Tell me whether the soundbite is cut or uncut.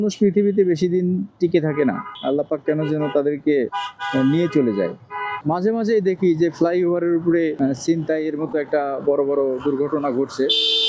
cut